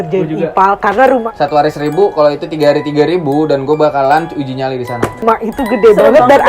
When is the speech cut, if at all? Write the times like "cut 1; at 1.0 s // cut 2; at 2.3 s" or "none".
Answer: cut 1; at 1.2 s // cut 2; at 5.2 s